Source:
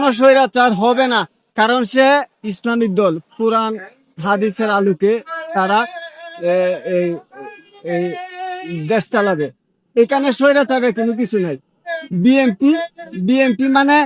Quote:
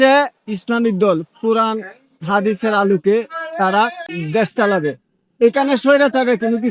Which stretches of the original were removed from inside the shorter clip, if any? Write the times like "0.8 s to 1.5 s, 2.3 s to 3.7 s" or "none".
6.1 s to 8.7 s